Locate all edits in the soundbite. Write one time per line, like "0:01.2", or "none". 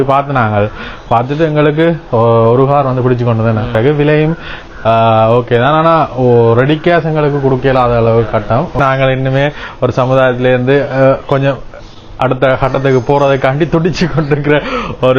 0:03.7
0:08.8